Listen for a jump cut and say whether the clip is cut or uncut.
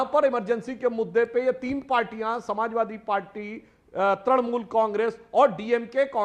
uncut